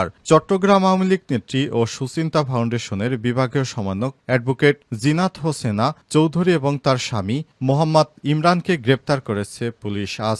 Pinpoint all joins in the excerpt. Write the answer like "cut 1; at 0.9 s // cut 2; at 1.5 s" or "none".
none